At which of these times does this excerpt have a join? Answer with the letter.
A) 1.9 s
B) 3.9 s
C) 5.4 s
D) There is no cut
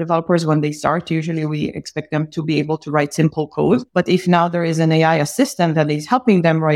B